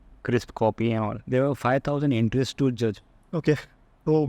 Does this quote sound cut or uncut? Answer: cut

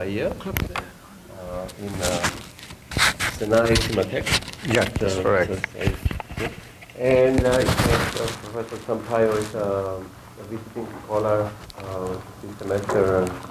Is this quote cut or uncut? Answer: uncut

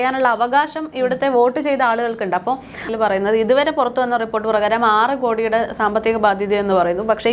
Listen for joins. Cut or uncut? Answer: cut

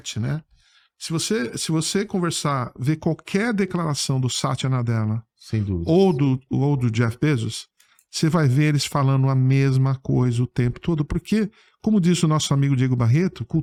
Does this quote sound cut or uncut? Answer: uncut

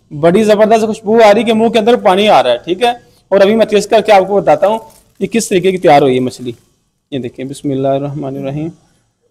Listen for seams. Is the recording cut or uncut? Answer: uncut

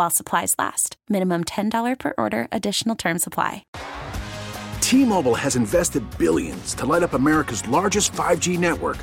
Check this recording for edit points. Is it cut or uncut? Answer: cut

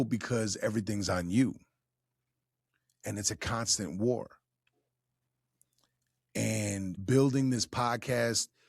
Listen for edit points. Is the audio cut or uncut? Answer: cut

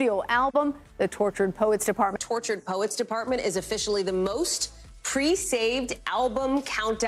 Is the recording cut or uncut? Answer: uncut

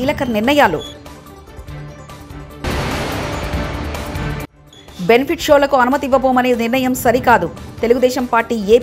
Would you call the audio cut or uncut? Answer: uncut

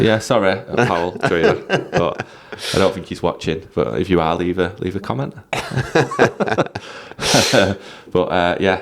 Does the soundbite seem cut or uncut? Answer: uncut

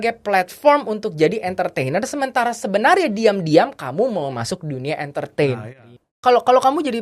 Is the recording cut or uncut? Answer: cut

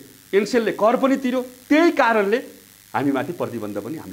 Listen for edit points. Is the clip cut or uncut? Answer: uncut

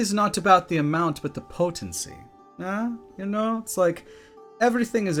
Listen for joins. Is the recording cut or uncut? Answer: uncut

